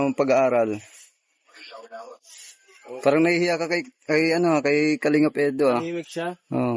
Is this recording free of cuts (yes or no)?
yes